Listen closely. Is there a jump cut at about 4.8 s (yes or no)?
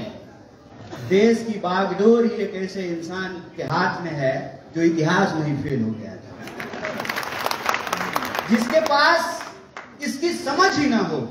no